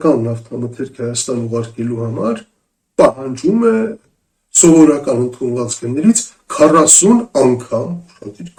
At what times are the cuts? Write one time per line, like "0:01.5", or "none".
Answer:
none